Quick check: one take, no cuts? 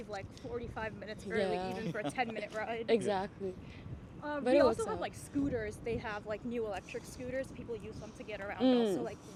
yes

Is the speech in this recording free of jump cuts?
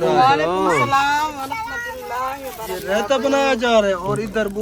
yes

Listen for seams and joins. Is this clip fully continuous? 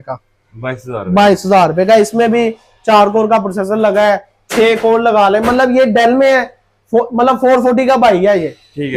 yes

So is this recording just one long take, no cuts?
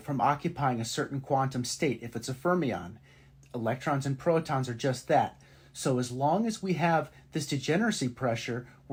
yes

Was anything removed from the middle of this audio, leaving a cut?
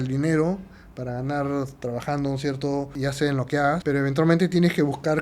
yes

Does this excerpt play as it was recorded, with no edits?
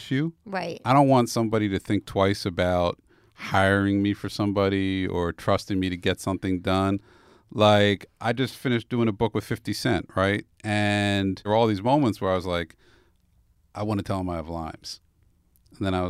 no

